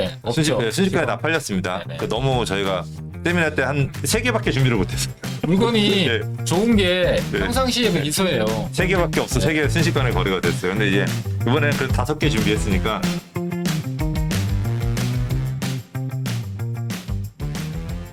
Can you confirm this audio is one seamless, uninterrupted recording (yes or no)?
yes